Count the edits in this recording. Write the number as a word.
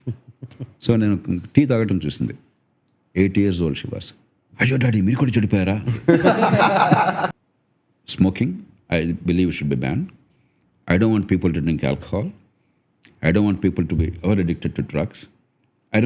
one